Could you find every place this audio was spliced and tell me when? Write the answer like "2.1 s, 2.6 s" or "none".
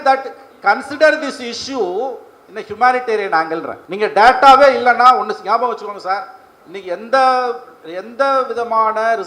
3.8 s